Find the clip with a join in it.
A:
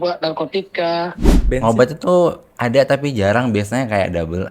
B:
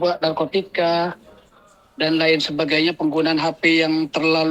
A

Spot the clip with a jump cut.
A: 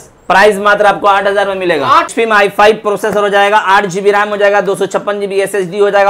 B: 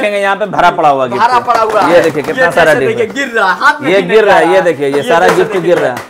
A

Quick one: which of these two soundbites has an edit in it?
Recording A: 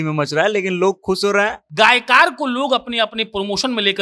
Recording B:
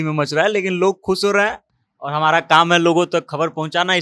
A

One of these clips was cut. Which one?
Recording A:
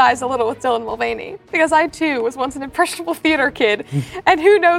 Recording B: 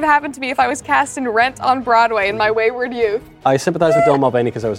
B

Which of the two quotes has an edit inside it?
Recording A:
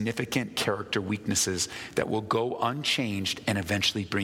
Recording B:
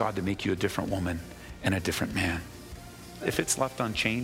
B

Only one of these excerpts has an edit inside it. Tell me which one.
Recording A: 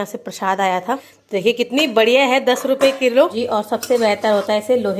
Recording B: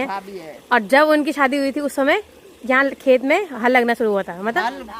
A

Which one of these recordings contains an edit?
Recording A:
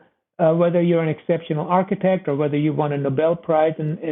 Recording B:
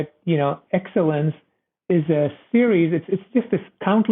B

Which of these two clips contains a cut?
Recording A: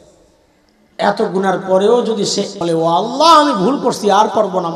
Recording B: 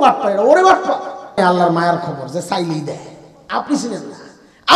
B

